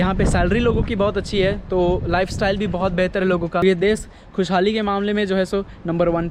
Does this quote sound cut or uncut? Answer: cut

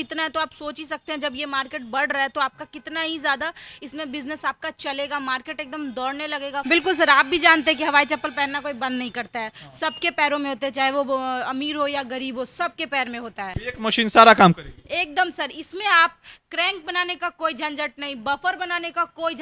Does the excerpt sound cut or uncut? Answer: cut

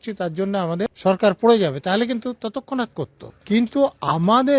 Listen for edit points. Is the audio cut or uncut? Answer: cut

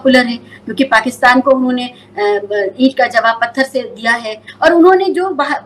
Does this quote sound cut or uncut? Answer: cut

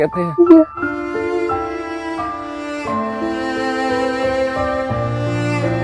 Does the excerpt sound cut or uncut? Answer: uncut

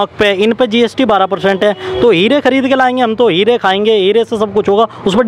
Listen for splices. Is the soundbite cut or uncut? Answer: uncut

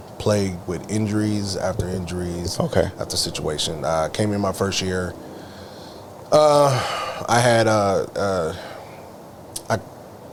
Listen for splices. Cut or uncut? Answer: uncut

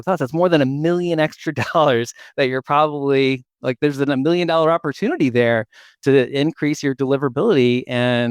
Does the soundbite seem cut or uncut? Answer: uncut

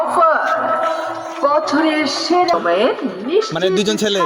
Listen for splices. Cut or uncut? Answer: cut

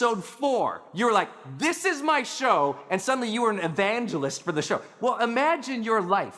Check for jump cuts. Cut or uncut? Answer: cut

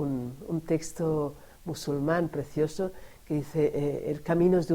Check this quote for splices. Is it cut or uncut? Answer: uncut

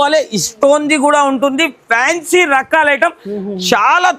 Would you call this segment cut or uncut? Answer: uncut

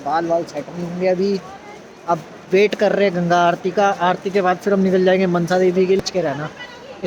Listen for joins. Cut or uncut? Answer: cut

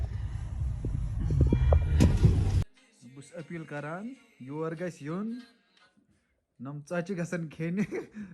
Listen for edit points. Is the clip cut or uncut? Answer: cut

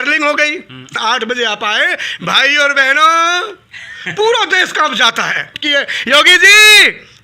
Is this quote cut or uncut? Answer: cut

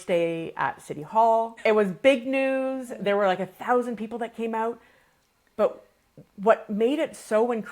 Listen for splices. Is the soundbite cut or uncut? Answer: cut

